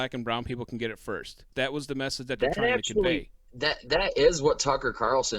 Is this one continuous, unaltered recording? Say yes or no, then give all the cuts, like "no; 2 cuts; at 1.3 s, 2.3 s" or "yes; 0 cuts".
no; 1 cut; at 1.5 s